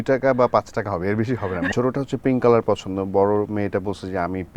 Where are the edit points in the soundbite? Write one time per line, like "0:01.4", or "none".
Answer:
0:01.7